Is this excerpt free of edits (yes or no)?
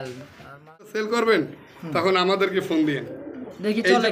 no